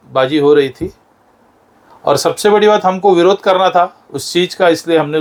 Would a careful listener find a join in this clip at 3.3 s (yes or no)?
no